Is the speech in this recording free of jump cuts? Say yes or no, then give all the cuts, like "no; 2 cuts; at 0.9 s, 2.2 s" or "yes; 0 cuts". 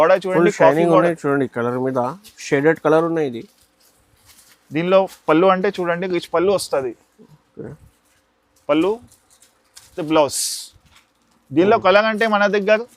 yes; 0 cuts